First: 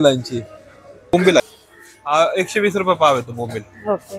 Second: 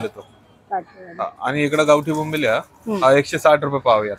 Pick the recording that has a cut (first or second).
first